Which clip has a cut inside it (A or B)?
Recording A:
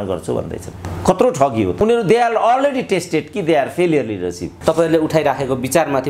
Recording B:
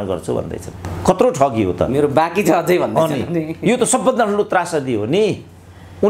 A